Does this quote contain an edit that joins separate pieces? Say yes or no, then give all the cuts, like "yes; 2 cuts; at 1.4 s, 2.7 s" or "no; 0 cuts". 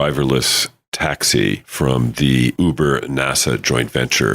yes; 2 cuts; at 1.7 s, 2.5 s